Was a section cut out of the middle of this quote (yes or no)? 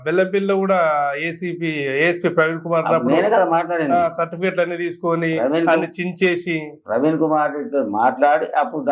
no